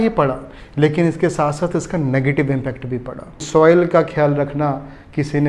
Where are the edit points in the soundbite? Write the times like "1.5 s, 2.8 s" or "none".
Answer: 3.4 s